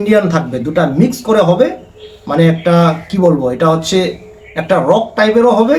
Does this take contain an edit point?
no; 0 cuts

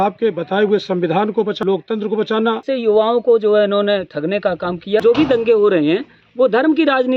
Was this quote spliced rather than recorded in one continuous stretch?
yes; 3 cuts; at 1.6 s, 2.6 s, 5.0 s

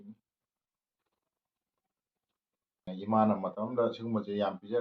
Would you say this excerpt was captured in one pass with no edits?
no; 1 cut; at 2.8 s

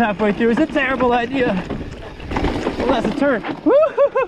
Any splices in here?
yes; 1 cut; at 2.2 s

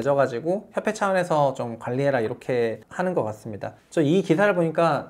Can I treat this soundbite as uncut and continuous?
yes; 0 cuts

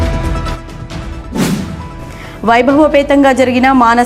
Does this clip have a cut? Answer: yes; 1 cut; at 1.5 s

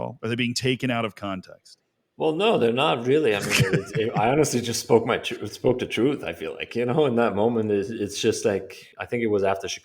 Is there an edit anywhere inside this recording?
yes; 1 cut; at 8.8 s

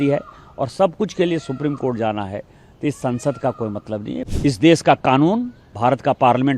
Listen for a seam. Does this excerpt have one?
yes; 1 cut; at 4.2 s

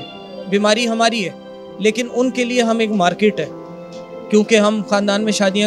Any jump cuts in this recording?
no; 0 cuts

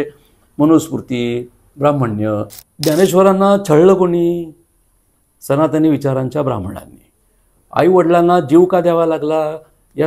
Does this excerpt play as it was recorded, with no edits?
no; 1 cut; at 2.6 s

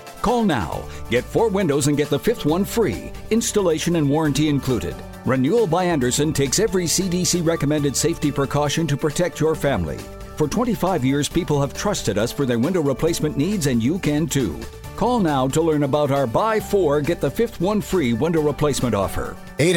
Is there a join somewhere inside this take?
no; 0 cuts

